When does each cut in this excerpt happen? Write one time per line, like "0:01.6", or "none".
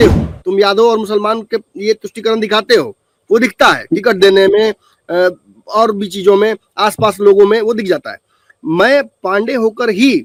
none